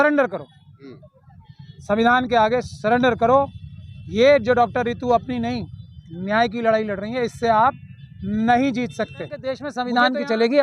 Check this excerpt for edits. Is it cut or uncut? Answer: cut